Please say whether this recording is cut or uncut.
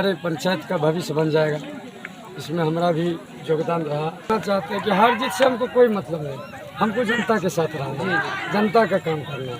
cut